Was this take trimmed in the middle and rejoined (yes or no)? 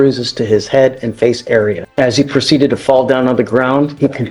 yes